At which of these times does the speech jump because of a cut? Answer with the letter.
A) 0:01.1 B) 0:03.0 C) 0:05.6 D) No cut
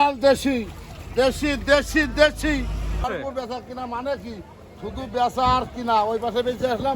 B